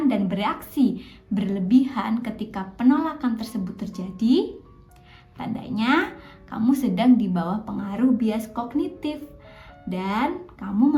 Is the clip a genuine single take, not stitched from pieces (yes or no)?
yes